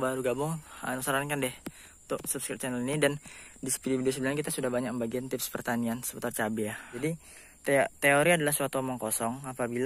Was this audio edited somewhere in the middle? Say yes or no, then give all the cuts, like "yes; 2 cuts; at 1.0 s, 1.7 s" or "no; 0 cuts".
yes; 1 cut; at 6.9 s